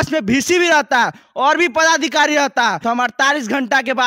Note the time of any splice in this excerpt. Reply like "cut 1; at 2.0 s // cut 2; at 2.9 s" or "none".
cut 1; at 2.8 s